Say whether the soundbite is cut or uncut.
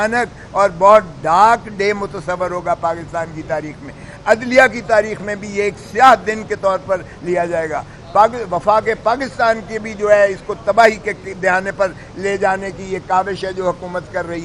uncut